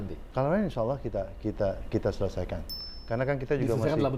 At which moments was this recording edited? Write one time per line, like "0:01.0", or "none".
none